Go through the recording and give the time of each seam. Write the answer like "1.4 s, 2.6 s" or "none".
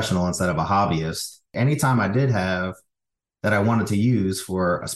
1.5 s